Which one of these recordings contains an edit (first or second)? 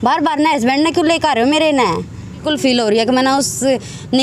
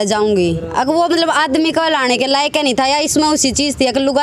first